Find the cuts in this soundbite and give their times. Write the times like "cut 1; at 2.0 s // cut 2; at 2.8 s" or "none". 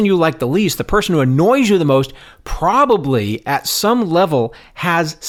none